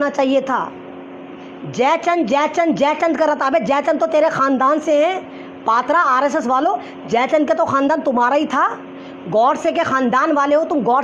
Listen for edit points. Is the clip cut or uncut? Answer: uncut